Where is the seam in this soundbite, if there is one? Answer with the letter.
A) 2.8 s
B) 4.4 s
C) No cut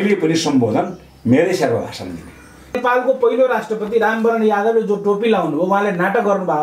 A